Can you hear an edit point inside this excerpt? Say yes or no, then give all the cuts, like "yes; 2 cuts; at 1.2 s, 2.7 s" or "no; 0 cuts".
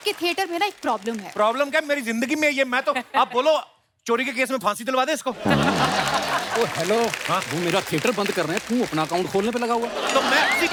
no; 0 cuts